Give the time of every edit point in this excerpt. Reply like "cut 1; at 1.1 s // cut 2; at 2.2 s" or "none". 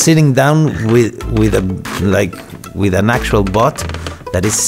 none